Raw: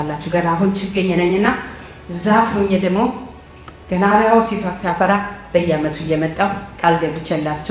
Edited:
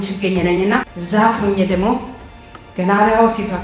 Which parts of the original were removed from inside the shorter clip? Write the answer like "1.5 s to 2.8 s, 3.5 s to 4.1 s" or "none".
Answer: 1.7 s to 2.1 s